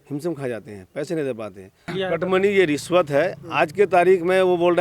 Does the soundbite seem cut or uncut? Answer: cut